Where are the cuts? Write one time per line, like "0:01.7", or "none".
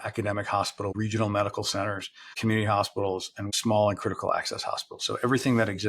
0:00.9
0:02.4
0:03.5